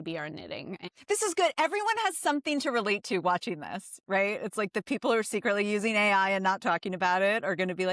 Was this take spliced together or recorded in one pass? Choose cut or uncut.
cut